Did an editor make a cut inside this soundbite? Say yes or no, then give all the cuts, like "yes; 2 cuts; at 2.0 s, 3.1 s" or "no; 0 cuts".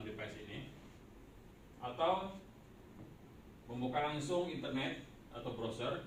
no; 0 cuts